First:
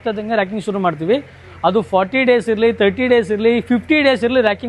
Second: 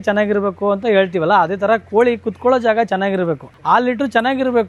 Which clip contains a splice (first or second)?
second